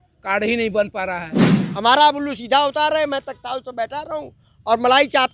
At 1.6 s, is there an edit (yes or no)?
yes